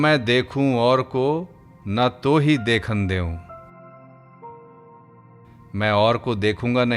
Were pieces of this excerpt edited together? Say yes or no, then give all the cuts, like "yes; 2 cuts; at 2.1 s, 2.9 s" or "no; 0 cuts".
no; 0 cuts